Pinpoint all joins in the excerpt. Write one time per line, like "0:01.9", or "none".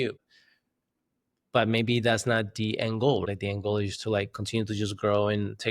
0:03.2